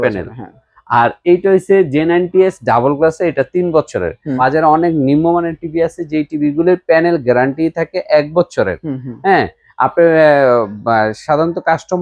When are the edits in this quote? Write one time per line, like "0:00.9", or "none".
0:04.4